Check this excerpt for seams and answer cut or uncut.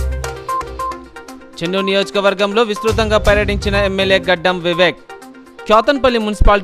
uncut